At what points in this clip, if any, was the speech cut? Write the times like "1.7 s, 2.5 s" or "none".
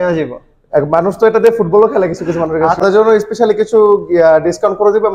2.8 s